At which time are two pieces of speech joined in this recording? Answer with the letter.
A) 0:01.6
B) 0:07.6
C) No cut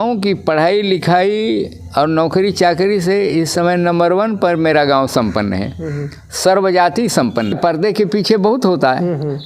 B